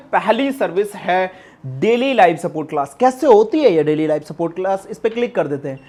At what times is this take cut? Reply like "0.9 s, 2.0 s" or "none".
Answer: none